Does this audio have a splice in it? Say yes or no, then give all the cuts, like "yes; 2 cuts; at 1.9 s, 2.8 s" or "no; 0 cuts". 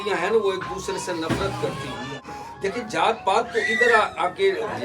yes; 1 cut; at 2.2 s